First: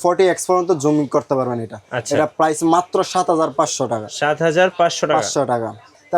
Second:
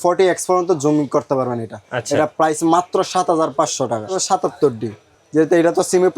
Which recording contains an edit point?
second; 1 cut; at 4.1 s

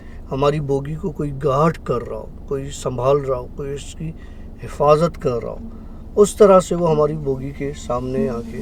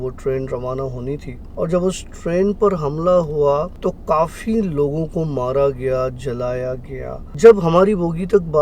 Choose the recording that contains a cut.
second; 3 cuts; at 1.4 s, 3.7 s, 7.2 s

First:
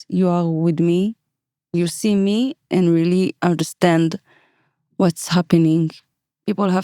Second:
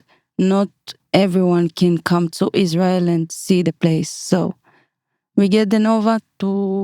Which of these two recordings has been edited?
first; 3 cuts; at 1.7 s, 2.6 s, 6.0 s

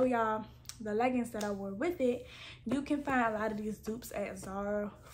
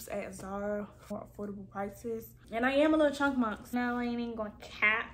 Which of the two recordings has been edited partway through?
second; 1 cut; at 2.3 s

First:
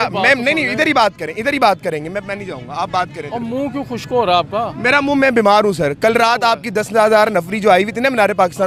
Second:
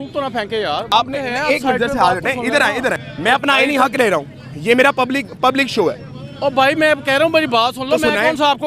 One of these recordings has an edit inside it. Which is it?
second; 2 cuts; at 0.9 s, 3.1 s

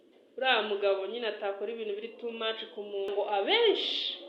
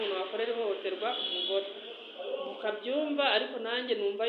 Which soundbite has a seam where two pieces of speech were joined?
first; 1 cut; at 3.1 s

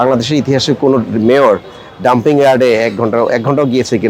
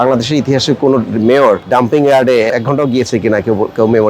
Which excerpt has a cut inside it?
second; 2 cuts; at 1.6 s, 2.5 s

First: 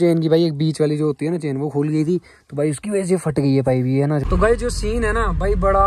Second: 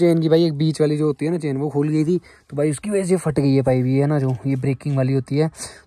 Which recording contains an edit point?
first; 1 cut; at 4.2 s

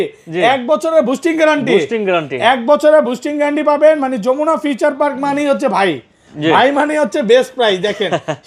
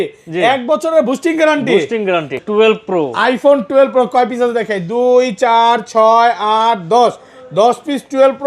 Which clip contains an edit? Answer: second; 1 cut; at 2.3 s

